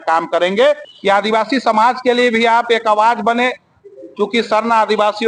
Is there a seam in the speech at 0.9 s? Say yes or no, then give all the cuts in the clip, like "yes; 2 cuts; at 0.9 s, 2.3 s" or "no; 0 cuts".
yes; 1 cut; at 0.9 s